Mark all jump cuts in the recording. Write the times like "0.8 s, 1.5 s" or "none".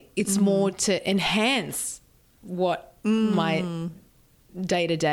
none